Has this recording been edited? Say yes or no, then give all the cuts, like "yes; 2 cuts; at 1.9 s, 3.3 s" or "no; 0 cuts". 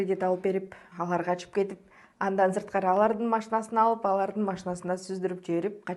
no; 0 cuts